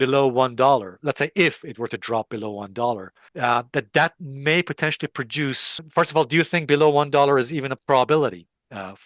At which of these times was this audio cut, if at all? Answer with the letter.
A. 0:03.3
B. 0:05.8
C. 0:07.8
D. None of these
B